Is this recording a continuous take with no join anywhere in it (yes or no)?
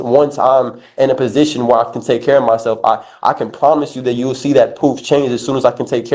yes